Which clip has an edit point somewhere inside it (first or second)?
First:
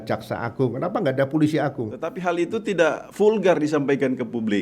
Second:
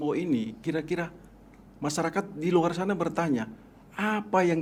first